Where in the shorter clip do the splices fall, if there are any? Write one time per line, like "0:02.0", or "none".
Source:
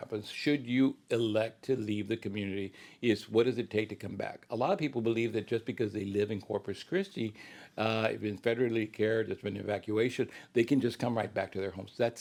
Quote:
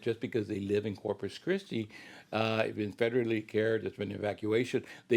none